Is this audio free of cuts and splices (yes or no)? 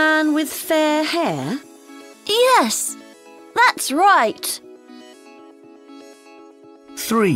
no